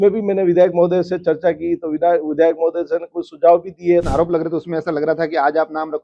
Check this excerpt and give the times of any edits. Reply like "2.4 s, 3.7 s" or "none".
4.1 s